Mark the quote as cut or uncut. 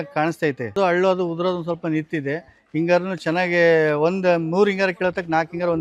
uncut